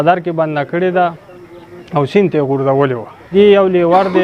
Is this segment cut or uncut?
cut